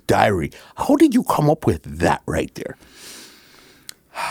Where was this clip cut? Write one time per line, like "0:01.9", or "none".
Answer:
none